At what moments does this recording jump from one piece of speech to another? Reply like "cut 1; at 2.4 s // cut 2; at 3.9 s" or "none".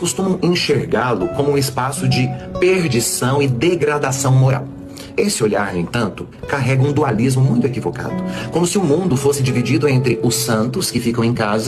none